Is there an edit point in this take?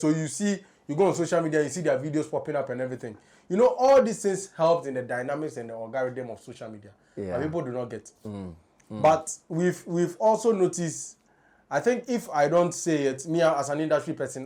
no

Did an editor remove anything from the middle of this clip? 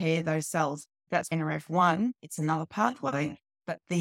yes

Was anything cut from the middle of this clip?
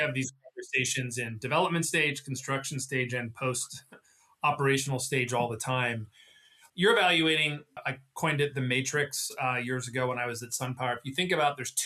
yes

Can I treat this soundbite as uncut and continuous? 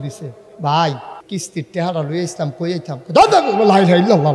no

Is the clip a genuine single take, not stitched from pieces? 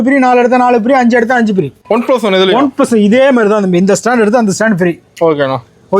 no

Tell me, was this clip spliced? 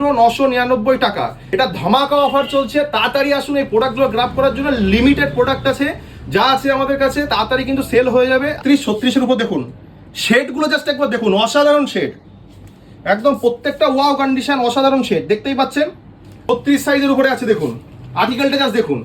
yes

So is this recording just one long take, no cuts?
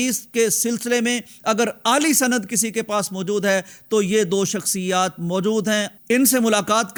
yes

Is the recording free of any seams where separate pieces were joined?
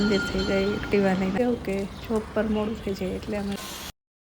no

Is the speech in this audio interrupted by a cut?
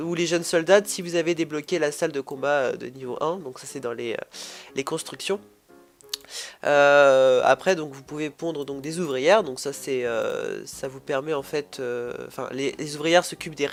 no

